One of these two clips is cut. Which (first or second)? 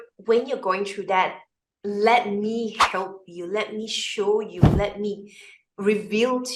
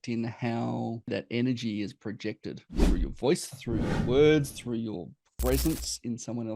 second